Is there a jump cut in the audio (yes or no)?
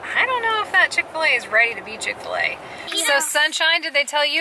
yes